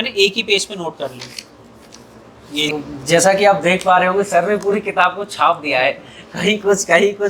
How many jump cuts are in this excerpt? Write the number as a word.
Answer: one